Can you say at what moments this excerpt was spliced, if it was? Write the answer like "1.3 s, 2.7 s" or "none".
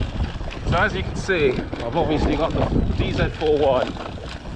none